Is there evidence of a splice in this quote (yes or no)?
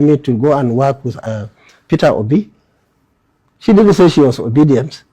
yes